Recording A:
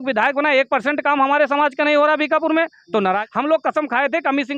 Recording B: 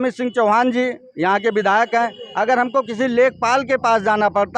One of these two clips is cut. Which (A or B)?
A